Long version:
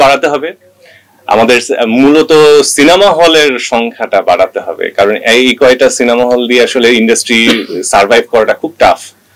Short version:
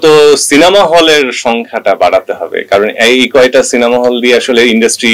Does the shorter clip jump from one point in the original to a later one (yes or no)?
no